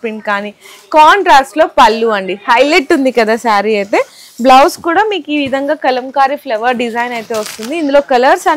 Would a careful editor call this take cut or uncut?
uncut